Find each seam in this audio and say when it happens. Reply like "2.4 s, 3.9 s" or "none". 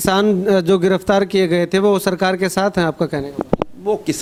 none